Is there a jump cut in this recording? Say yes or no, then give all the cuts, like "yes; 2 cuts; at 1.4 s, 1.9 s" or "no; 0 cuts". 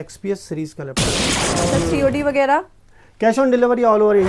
yes; 1 cut; at 1.3 s